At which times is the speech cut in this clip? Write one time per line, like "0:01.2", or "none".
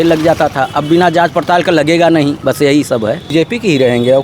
0:03.2